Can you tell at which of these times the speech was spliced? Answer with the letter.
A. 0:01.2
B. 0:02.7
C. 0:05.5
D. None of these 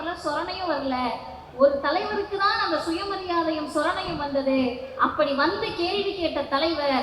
D